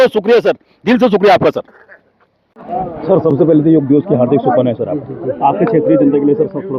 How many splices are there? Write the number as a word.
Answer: zero